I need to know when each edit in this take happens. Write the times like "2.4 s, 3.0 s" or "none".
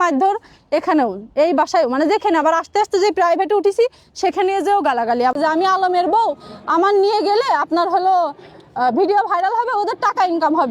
5.4 s